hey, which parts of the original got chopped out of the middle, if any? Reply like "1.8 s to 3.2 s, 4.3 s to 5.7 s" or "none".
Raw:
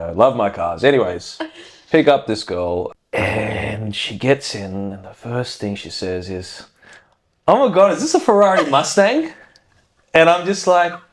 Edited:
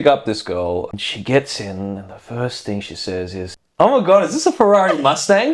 3.0 s to 3.9 s, 6.5 s to 7.3 s